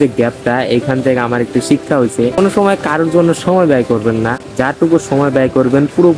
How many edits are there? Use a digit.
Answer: 2